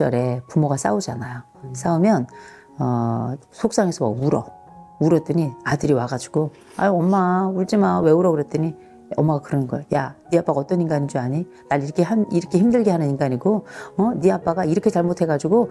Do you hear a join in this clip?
no; 0 cuts

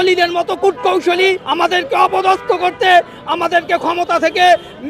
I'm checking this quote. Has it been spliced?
yes; 1 cut; at 1.4 s

